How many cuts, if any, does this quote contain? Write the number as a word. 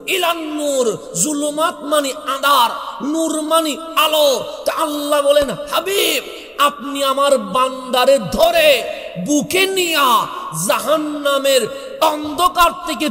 zero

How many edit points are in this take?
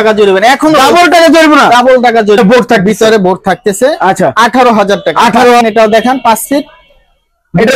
two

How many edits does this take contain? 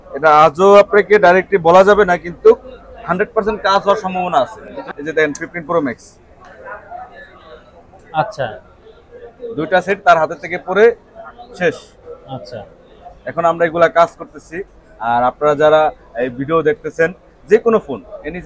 one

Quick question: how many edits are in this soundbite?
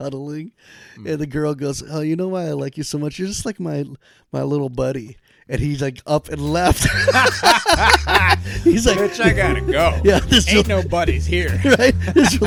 zero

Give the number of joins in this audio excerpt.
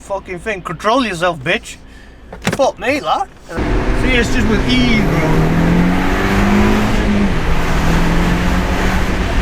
one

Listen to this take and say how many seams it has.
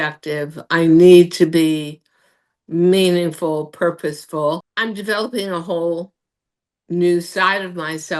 one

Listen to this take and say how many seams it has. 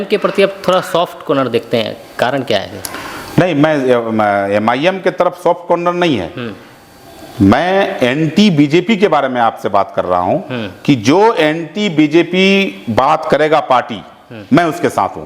zero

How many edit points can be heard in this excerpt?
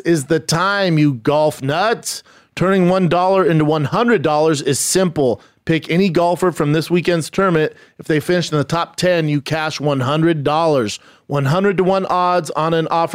zero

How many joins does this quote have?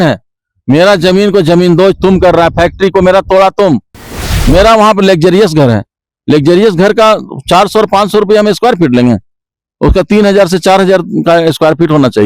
one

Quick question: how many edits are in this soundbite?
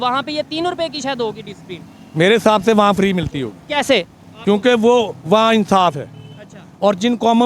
zero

